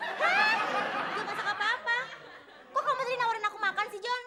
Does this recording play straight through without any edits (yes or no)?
yes